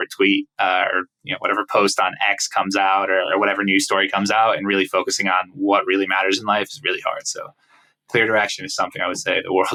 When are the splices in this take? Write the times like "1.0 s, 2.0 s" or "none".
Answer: none